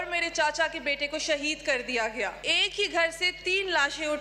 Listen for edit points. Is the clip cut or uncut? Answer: cut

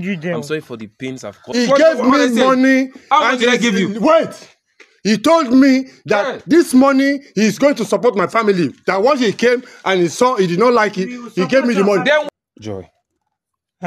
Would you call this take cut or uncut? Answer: cut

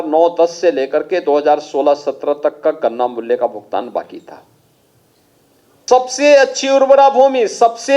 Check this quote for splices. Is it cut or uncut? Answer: cut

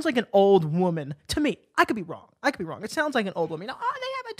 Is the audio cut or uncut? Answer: uncut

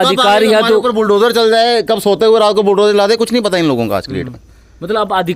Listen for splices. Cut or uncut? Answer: uncut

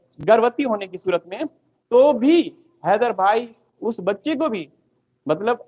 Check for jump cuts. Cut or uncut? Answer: uncut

